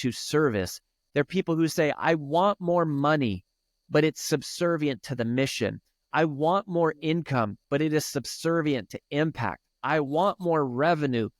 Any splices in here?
yes; 1 cut; at 0.9 s

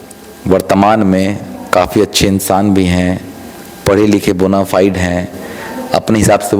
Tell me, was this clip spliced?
no; 0 cuts

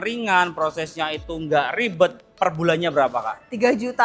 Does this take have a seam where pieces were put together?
no; 0 cuts

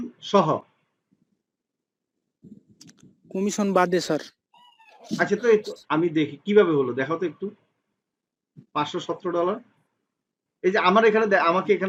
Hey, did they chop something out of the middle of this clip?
no; 0 cuts

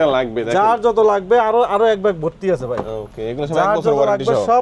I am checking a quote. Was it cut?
no; 0 cuts

